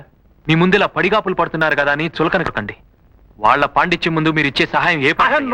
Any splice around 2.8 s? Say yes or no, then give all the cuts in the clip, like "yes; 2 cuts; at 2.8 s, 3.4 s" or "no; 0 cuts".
no; 0 cuts